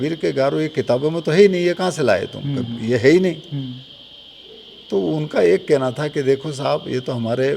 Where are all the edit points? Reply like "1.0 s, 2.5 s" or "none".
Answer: none